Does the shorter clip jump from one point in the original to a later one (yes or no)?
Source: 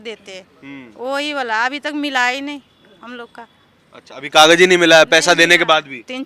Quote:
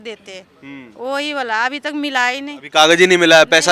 yes